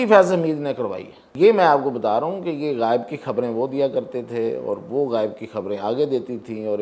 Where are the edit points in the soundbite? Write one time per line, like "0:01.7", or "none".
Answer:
0:01.2